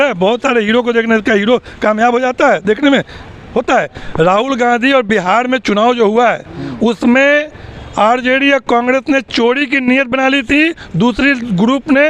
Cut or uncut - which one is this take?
uncut